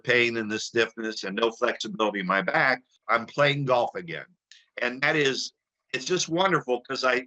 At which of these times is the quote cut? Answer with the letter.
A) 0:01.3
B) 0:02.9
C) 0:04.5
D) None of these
B